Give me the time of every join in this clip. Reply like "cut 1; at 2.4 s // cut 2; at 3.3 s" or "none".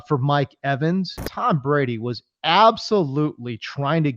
cut 1; at 1.2 s